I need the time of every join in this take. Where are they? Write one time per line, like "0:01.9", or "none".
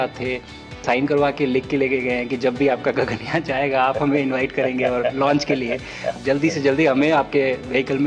0:00.8
0:06.1